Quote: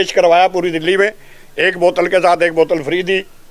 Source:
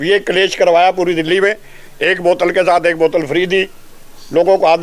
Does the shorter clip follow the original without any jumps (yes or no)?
yes